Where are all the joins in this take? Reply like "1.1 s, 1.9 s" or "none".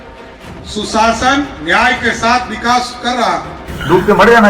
3.5 s